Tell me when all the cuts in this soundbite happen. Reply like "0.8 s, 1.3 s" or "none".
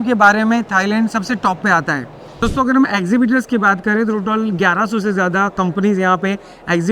2.4 s